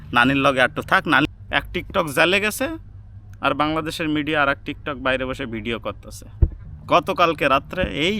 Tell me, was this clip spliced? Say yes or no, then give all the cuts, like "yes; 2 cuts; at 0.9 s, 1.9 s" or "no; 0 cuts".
yes; 2 cuts; at 1.2 s, 6.7 s